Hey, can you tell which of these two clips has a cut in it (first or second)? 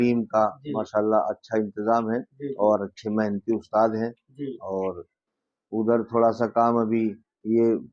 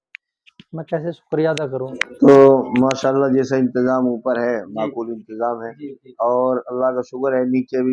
second